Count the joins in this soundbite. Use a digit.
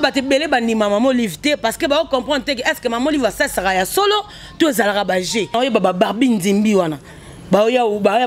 1